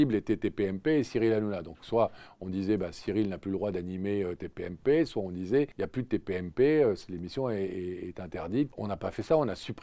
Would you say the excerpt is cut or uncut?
cut